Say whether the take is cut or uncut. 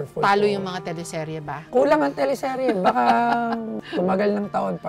uncut